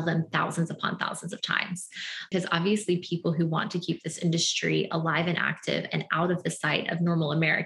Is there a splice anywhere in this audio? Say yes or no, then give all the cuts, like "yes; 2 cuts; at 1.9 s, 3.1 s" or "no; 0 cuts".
yes; 1 cut; at 2.3 s